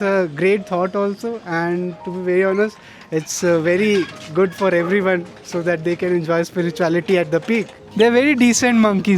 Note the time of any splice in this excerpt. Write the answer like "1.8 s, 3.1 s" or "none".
7.8 s